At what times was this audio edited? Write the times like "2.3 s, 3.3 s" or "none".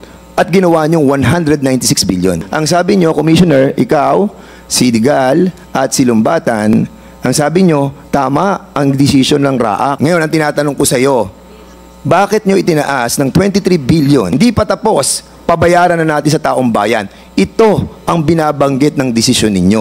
2.5 s, 10.0 s, 14.3 s